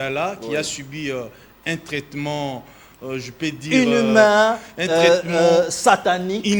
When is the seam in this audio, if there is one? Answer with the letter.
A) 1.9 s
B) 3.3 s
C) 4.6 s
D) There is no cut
D